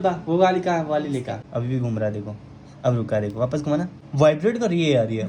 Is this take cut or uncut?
cut